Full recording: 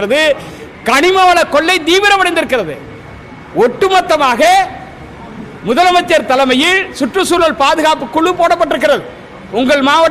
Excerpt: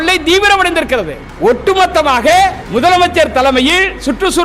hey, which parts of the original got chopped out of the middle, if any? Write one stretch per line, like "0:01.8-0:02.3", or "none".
0:02.8-0:03.4
0:04.8-0:05.6

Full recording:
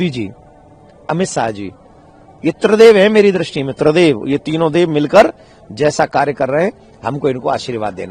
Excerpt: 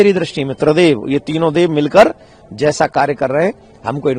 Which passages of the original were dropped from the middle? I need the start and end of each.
none

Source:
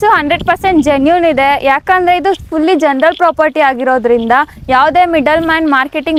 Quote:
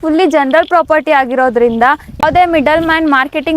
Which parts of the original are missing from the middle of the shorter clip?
0:04.7-0:04.8

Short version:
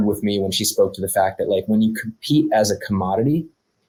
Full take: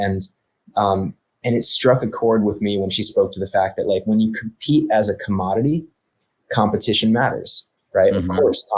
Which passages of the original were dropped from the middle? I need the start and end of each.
none

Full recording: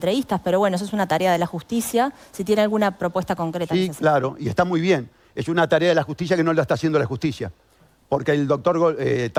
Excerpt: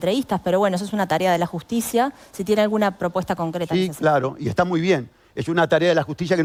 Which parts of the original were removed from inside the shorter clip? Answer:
none

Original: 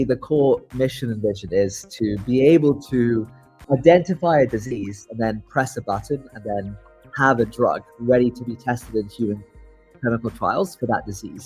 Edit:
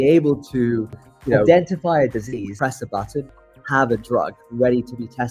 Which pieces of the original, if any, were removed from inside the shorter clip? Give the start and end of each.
0:04.9-0:05.5
0:06.3-0:06.9

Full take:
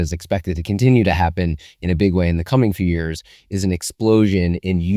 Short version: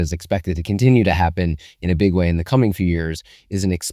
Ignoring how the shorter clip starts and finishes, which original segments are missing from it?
none

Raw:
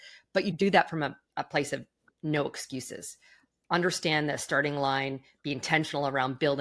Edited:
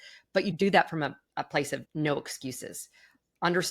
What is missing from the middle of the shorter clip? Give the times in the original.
0:01.9-0:02.1

